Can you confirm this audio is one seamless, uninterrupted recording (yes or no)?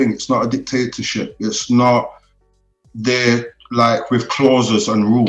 yes